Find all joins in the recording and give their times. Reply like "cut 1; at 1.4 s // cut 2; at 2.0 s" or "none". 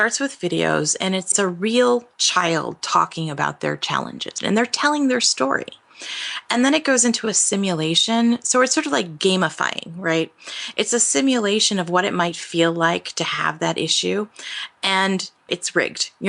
cut 1; at 1.3 s // cut 2; at 4.4 s